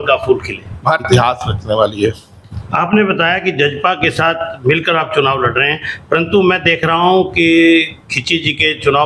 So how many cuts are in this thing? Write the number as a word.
one